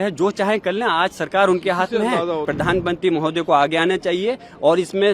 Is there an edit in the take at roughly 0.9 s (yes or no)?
no